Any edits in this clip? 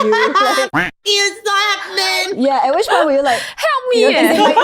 no; 0 cuts

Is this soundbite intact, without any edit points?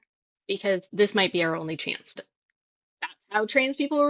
no; 2 cuts; at 0.9 s, 2.2 s

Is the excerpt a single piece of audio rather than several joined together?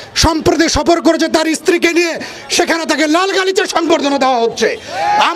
yes; 0 cuts

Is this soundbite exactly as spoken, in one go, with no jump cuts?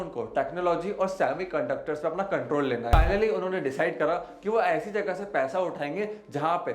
no; 1 cut; at 2.9 s

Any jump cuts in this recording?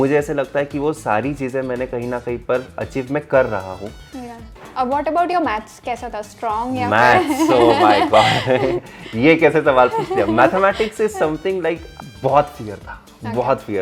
yes; 1 cut; at 3.9 s

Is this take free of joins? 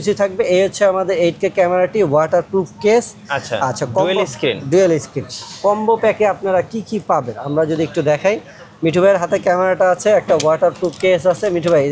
yes; 0 cuts

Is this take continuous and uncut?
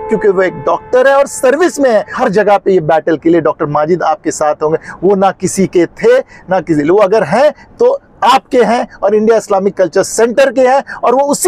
no; 1 cut; at 2.1 s

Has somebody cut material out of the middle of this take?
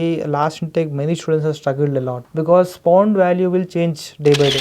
yes; 1 cut; at 2.2 s

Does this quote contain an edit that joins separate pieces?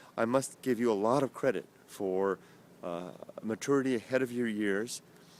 no; 0 cuts

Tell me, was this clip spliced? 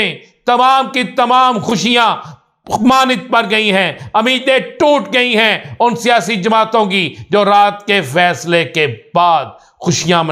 no; 0 cuts

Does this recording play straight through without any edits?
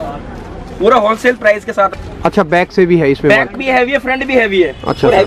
no; 1 cut; at 1.9 s

